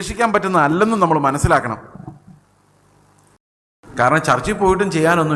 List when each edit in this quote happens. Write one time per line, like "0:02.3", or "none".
0:03.3